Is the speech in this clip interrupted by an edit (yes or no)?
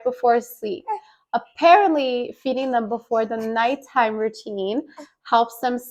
no